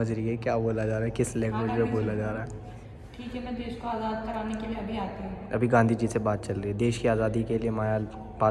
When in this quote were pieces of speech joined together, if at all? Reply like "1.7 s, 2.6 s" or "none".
none